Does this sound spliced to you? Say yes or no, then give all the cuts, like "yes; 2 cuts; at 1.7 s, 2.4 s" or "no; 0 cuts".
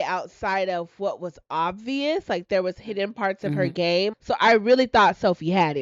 yes; 1 cut; at 4.1 s